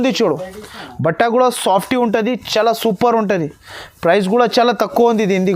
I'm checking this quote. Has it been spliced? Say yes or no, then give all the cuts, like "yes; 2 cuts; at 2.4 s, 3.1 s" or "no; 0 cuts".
no; 0 cuts